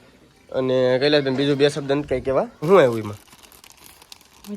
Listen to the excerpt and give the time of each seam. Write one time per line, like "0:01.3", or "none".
0:02.7

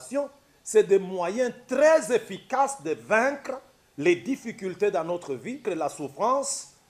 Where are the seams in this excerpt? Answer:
0:05.6

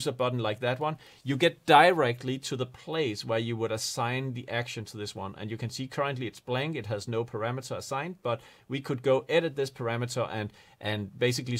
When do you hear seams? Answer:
none

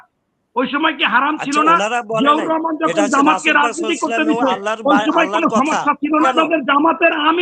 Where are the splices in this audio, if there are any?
0:06.2

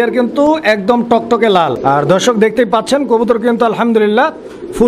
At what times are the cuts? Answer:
0:02.2

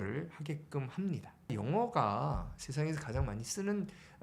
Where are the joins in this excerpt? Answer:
0:01.4

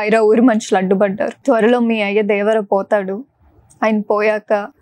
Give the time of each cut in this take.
0:01.4

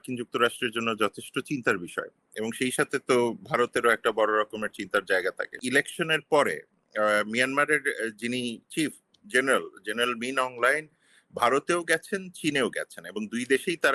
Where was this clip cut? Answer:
0:05.6

